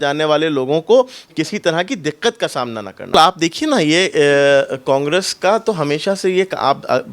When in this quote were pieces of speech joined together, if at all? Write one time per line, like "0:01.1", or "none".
0:03.1